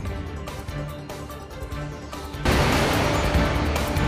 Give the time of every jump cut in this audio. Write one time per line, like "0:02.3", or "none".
0:02.1

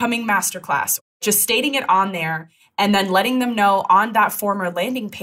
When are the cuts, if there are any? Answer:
0:01.1

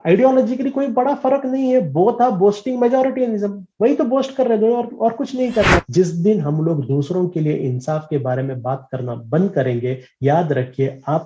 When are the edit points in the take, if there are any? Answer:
0:05.9

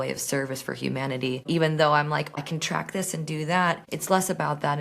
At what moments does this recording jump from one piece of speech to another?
0:01.4
0:02.4
0:03.9

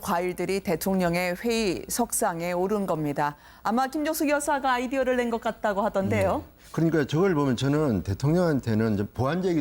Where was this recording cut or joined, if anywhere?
none

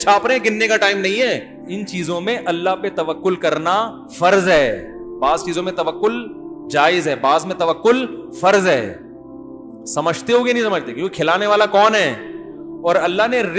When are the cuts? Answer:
0:01.6

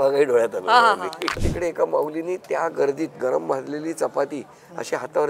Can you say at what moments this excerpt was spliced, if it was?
0:01.4

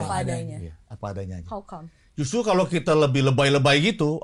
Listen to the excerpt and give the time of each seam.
none

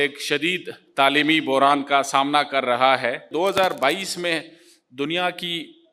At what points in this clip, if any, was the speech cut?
0:03.3

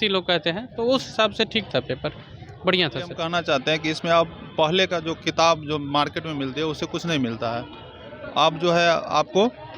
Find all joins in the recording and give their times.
0:03.2

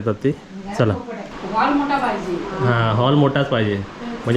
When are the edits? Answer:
0:01.3

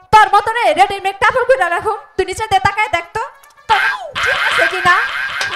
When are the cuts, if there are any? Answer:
none

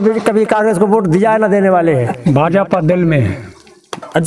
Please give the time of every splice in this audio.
0:02.2

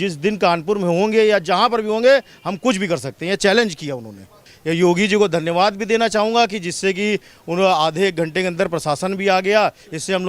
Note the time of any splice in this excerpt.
0:04.5

